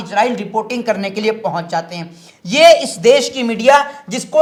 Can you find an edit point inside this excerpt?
no; 0 cuts

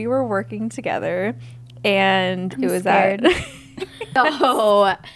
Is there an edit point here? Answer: yes; 1 cut; at 4.2 s

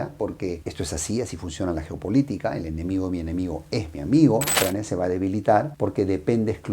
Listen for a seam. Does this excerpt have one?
yes; 1 cut; at 4.5 s

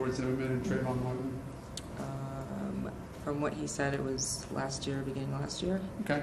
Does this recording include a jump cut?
yes; 1 cut; at 3.7 s

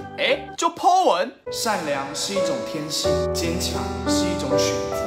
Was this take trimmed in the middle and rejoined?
no; 0 cuts

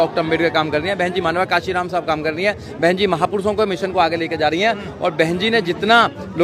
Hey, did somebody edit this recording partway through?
no; 0 cuts

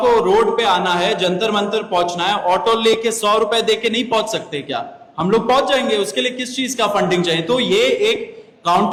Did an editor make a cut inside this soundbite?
no; 0 cuts

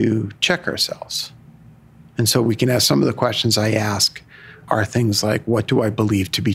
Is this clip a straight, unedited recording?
no; 1 cut; at 4.6 s

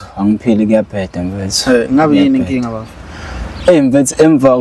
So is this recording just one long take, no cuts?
yes; 0 cuts

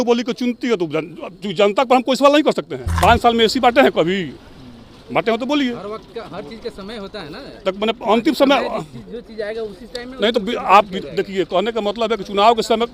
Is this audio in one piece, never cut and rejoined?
no; 1 cut; at 2.8 s

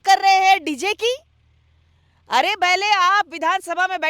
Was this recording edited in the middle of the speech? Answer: no; 0 cuts

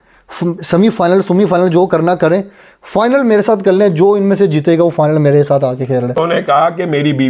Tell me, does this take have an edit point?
yes; 1 cut; at 6.2 s

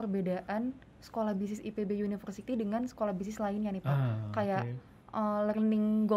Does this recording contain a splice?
no; 0 cuts

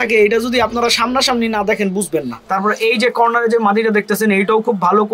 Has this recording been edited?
yes; 1 cut; at 2.7 s

